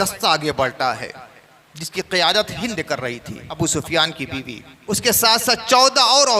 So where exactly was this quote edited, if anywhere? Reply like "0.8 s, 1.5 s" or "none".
3.6 s, 4.7 s

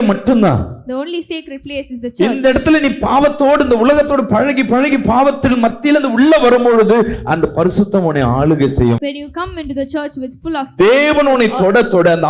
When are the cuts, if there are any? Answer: none

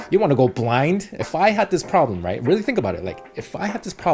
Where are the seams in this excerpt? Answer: 1.2 s

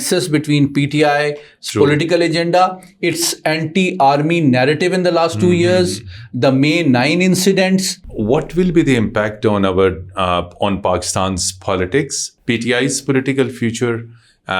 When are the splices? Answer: 8.0 s, 12.2 s

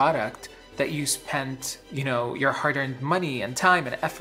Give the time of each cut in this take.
1.7 s

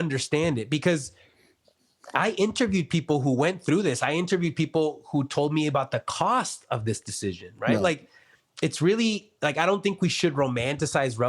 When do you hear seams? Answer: none

